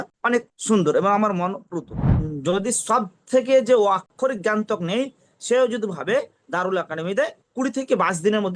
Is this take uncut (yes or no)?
no